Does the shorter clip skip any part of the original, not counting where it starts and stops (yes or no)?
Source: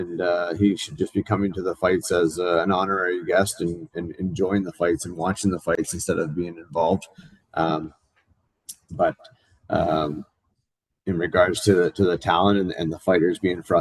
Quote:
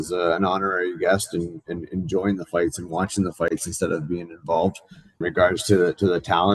yes